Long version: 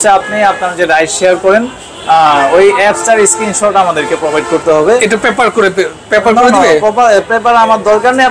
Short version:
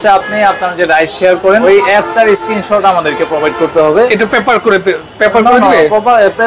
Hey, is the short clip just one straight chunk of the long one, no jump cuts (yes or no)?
no